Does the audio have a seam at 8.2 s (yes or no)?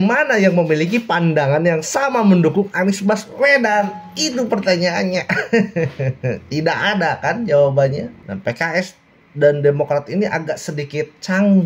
yes